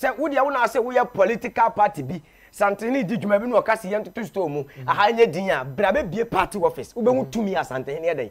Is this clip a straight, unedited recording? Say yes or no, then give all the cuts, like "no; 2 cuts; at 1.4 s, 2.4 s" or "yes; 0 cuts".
yes; 0 cuts